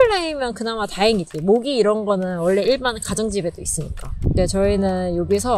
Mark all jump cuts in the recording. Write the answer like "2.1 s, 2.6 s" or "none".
none